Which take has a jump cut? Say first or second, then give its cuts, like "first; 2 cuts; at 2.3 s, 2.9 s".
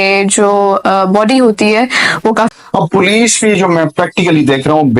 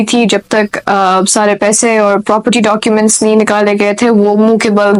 first; 1 cut; at 2.5 s